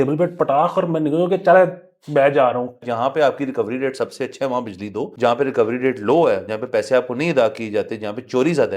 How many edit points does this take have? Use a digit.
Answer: 2